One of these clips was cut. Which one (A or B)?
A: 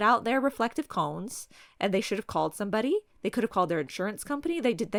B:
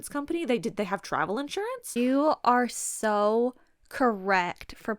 B